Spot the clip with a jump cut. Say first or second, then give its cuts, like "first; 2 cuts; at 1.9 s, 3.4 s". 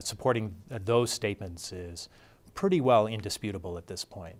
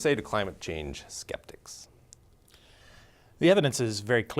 second; 1 cut; at 3.4 s